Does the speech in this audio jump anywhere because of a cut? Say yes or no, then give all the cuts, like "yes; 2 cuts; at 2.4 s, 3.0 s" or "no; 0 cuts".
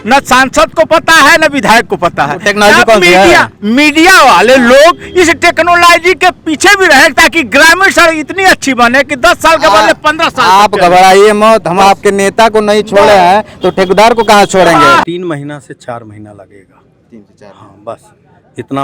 yes; 1 cut; at 15.0 s